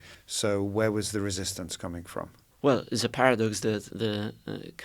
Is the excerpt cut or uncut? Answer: cut